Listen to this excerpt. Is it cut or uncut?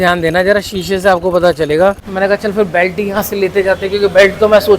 cut